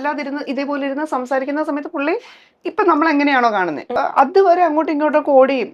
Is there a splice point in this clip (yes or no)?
yes